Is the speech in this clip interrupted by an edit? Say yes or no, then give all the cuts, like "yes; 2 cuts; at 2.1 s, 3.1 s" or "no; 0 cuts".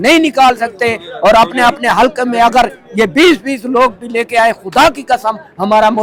no; 0 cuts